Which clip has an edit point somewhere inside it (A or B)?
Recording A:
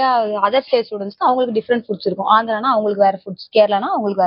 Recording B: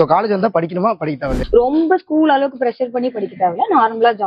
B